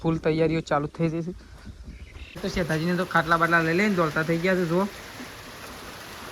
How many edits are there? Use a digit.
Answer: 1